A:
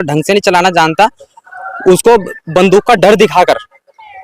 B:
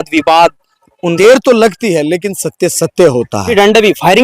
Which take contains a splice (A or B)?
B